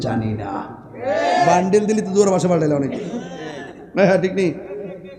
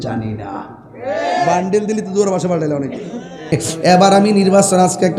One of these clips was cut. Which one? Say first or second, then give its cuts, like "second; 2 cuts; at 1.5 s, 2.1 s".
second; 1 cut; at 3.6 s